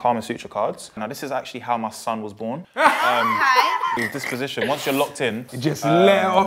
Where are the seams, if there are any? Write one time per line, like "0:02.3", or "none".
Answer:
0:01.0
0:05.5